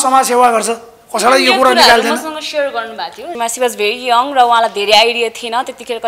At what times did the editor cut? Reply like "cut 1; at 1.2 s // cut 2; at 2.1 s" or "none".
cut 1; at 3.3 s